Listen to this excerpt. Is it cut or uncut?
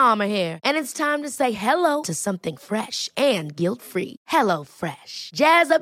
uncut